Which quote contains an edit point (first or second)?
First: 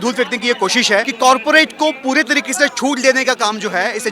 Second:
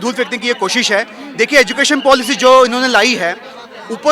first